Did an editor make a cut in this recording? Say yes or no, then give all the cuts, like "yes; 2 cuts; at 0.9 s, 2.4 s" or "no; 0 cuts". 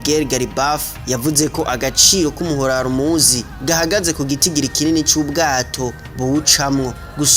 yes; 2 cuts; at 0.9 s, 3.5 s